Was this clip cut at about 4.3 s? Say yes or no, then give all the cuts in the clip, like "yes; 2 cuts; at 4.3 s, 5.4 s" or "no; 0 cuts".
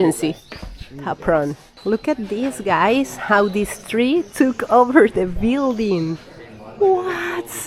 no; 1 cut; at 1.7 s